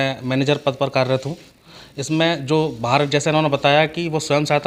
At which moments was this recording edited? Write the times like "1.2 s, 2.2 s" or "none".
none